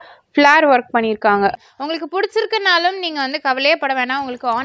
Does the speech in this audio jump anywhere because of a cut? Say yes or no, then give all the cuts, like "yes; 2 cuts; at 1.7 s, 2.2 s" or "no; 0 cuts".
yes; 1 cut; at 1.6 s